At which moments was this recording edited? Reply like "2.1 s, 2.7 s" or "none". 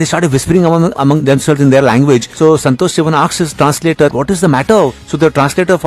1.0 s, 2.3 s, 4.1 s, 5.0 s